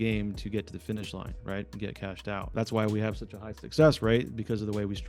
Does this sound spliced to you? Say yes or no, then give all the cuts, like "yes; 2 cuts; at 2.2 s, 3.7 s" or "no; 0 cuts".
yes; 1 cut; at 2.5 s